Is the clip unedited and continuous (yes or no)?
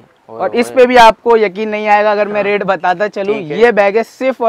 yes